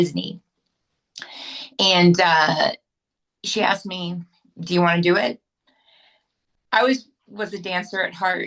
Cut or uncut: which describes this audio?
uncut